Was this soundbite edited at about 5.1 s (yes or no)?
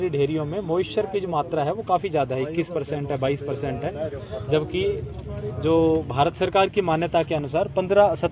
no